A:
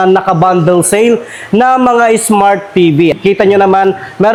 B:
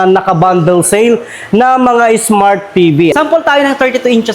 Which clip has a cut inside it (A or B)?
B